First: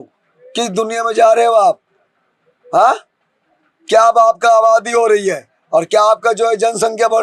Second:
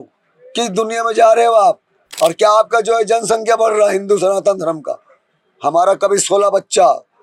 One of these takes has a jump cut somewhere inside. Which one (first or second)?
second